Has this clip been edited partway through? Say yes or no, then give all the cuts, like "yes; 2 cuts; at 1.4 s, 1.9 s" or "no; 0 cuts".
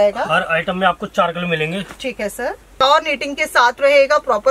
yes; 1 cut; at 2.8 s